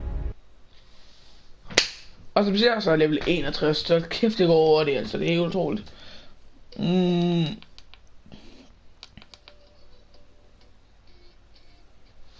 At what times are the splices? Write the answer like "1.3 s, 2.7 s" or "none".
none